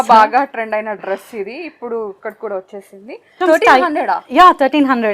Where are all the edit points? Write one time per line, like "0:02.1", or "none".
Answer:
0:03.4